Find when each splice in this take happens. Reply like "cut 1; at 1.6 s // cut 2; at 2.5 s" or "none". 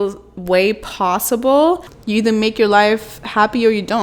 cut 1; at 1.9 s